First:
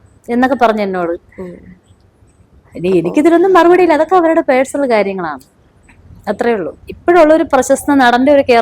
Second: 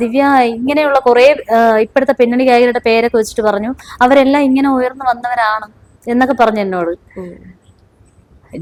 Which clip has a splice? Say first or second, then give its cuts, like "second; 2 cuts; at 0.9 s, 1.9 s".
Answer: first; 1 cut; at 6.7 s